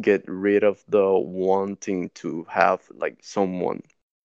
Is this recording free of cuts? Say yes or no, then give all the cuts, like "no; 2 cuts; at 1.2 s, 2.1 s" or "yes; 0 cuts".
no; 1 cut; at 2.9 s